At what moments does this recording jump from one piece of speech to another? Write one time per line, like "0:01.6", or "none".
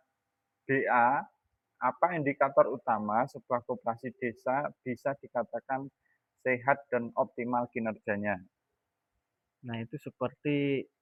none